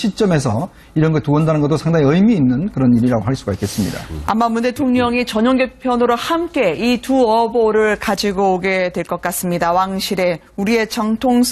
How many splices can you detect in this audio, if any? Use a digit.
1